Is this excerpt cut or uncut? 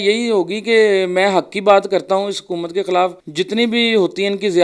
uncut